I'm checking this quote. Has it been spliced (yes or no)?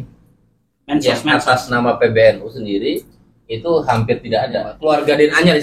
yes